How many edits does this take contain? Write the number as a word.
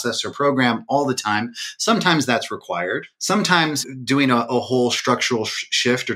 two